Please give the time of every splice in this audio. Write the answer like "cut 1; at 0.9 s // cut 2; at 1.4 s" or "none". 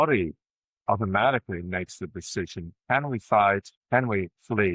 cut 1; at 3.7 s